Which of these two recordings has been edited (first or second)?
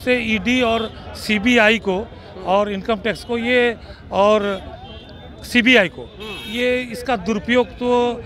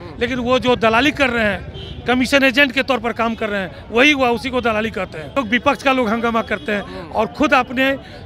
second